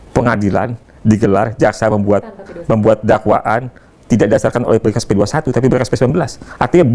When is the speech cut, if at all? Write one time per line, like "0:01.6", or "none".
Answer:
none